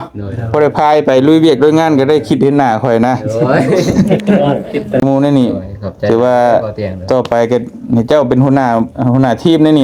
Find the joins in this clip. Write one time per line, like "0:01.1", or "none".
0:05.0